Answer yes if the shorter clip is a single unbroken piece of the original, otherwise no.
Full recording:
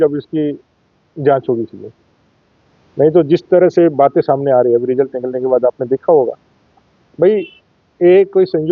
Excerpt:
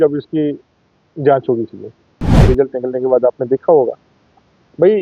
no